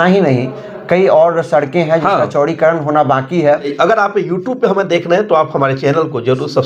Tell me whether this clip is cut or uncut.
cut